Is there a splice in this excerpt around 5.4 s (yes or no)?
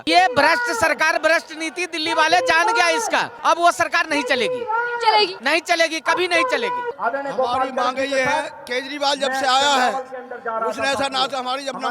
yes